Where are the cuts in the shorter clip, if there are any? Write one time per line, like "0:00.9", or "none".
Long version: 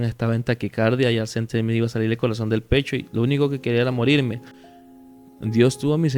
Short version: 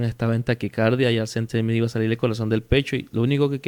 none